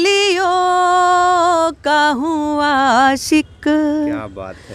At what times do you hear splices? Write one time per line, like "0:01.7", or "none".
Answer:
none